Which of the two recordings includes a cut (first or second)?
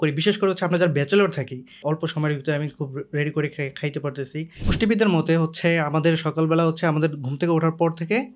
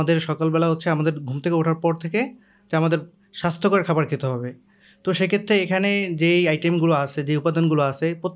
first